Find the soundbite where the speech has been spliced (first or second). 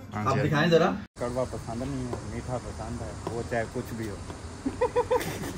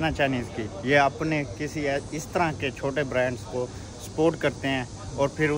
first